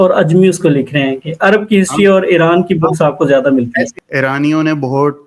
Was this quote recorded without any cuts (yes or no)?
no